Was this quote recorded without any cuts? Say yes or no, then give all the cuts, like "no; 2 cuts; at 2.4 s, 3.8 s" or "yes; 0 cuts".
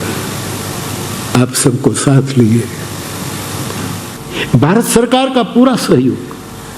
no; 1 cut; at 4.2 s